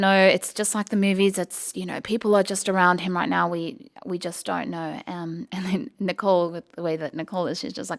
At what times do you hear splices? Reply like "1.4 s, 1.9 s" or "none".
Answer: none